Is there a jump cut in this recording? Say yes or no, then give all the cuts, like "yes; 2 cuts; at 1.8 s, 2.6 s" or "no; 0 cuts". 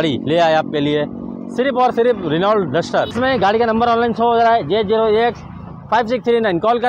yes; 1 cut; at 3.1 s